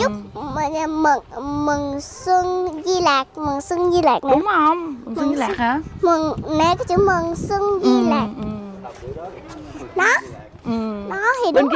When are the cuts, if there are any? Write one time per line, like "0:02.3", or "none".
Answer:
none